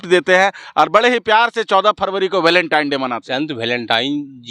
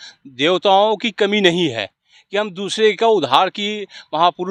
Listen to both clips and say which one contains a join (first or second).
first